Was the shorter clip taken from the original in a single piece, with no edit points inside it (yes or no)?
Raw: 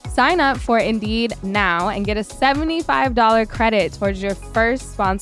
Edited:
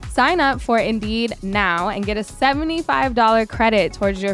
yes